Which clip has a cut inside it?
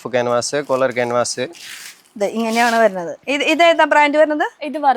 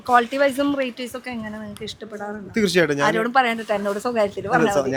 first; 1 cut; at 3.2 s

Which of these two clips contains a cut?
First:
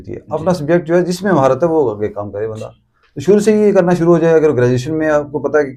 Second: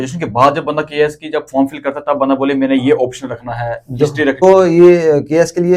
second; 1 cut; at 4.4 s

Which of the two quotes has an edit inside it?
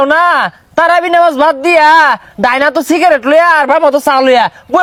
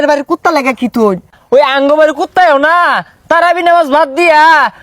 second; 1 cut; at 1.3 s

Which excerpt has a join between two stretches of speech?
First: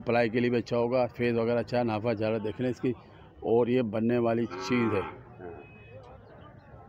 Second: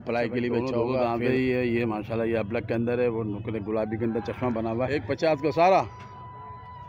second; 2 cuts; at 1.2 s, 4.9 s

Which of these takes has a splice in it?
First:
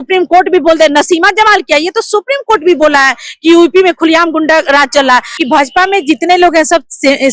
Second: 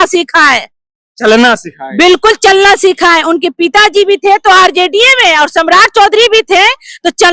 first; 1 cut; at 5.4 s

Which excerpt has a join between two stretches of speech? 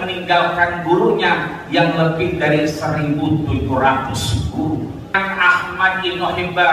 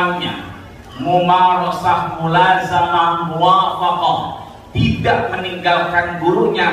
first; 1 cut; at 5.1 s

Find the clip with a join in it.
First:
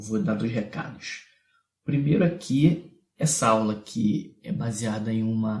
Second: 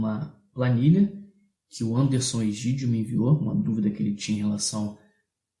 first; 1 cut; at 3.8 s

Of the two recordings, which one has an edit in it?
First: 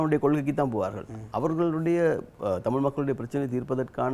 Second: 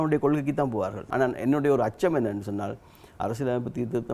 second; 1 cut; at 1.0 s

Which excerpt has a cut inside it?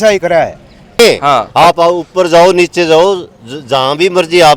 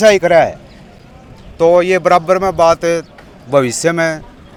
first; 1 cut; at 1.0 s

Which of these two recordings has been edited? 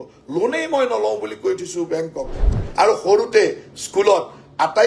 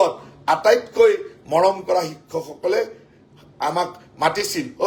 first; 1 cut; at 2.4 s

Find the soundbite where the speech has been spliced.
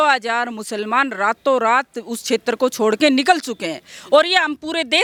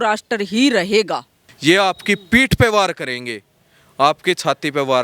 second; 1 cut; at 1.4 s

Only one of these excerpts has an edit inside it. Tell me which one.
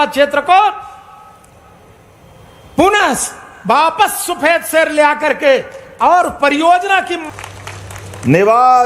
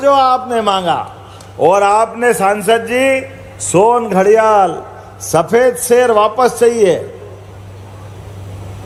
first; 1 cut; at 7.2 s

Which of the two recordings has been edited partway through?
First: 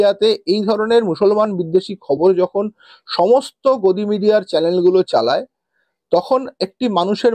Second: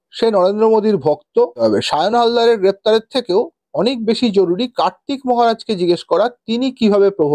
second; 1 cut; at 1.5 s

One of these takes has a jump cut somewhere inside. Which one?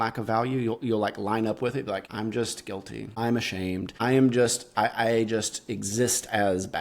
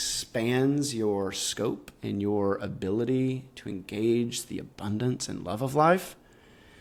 first; 2 cuts; at 2.0 s, 3.1 s

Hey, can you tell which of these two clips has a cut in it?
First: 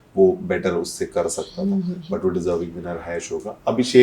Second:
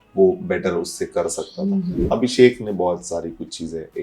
second; 1 cut; at 2.0 s

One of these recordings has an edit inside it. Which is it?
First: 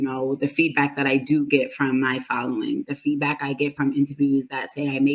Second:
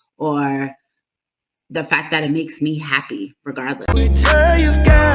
second; 1 cut; at 3.9 s

